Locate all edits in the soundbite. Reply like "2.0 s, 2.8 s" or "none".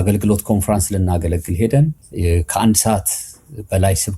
2.1 s